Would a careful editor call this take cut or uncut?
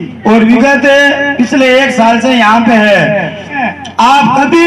cut